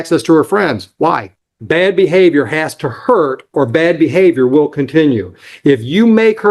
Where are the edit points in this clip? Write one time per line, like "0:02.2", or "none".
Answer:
0:01.5